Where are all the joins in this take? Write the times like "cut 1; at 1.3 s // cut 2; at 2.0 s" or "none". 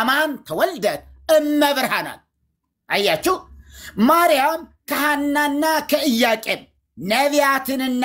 none